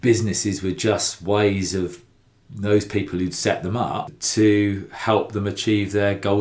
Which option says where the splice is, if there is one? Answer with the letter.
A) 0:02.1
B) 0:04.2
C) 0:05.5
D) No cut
B